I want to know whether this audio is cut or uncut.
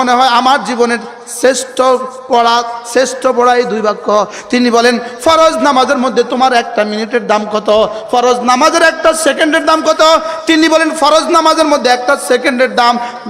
uncut